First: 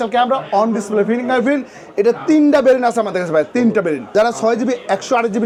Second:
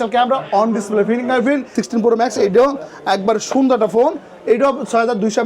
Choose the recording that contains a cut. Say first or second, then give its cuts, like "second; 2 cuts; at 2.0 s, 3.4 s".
second; 1 cut; at 1.8 s